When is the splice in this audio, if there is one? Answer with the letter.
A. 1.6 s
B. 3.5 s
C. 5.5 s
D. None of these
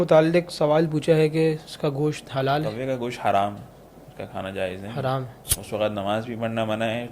C